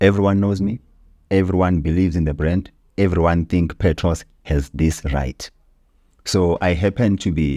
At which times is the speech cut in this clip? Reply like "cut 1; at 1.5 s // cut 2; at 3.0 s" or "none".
none